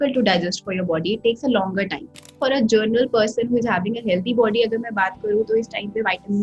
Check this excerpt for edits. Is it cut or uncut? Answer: cut